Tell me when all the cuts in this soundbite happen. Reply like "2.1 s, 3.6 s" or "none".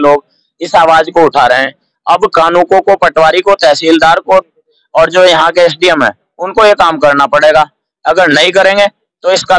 none